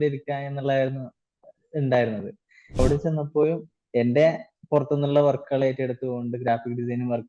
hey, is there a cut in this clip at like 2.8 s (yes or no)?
yes